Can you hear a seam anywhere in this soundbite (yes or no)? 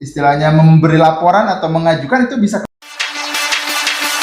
yes